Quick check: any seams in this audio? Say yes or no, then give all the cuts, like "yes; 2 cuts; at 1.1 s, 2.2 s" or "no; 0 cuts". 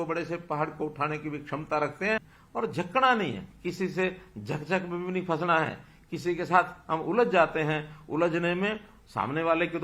yes; 1 cut; at 2.4 s